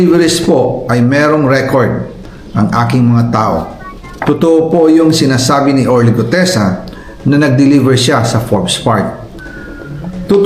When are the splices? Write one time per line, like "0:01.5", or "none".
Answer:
none